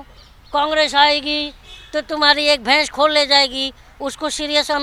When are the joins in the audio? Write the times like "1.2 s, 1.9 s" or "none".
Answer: none